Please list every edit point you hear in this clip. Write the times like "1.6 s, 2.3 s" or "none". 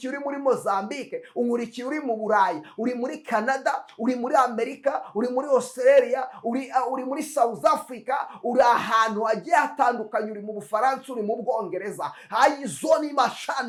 none